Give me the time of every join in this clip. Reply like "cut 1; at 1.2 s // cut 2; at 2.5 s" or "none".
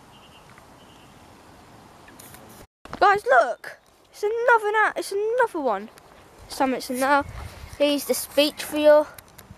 cut 1; at 2.9 s